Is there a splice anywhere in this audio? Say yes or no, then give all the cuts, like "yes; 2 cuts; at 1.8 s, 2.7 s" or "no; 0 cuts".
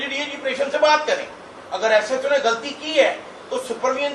no; 0 cuts